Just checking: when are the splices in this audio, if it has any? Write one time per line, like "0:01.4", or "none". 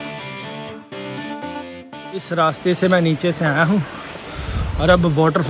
0:02.0